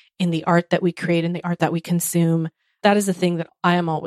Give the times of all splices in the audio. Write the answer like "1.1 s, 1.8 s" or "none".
1.6 s